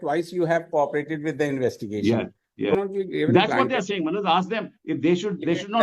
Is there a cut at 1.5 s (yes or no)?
no